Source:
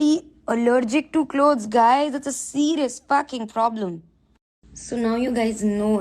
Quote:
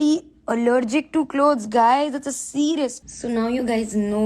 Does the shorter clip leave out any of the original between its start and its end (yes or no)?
yes